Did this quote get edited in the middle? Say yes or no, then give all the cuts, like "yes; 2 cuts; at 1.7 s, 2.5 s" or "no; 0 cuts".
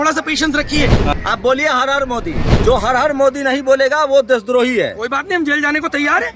yes; 2 cuts; at 1.1 s, 2.5 s